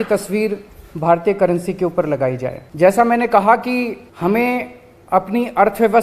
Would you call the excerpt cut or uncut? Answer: cut